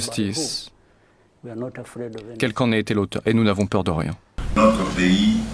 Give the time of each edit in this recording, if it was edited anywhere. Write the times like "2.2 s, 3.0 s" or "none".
4.2 s